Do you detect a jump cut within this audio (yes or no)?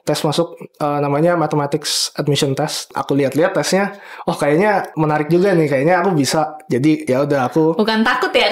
yes